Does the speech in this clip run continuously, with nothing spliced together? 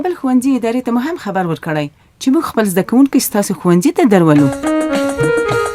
no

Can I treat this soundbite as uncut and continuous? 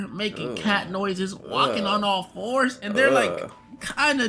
yes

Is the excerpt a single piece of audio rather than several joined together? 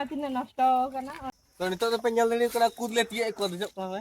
no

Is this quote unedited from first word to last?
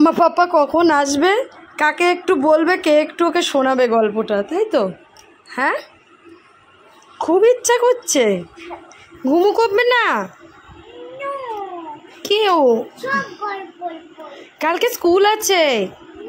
yes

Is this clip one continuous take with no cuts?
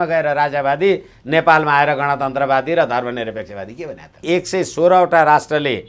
no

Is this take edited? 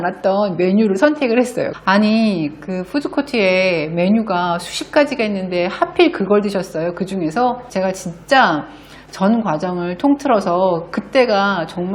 yes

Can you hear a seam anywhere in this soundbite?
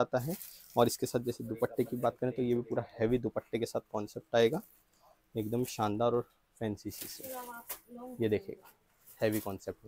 no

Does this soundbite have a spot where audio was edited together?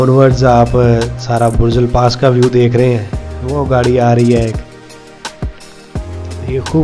no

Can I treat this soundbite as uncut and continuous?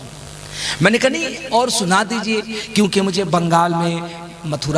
yes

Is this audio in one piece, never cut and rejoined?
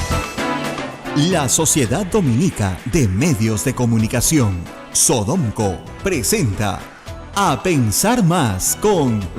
no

